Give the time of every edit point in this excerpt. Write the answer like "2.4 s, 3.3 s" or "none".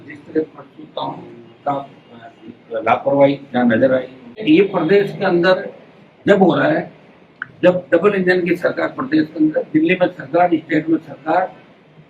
4.4 s